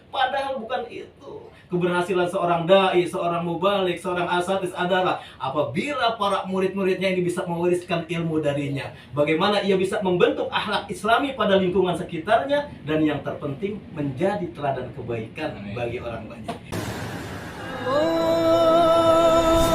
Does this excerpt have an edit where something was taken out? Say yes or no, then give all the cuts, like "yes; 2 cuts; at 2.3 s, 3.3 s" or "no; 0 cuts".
yes; 1 cut; at 16.7 s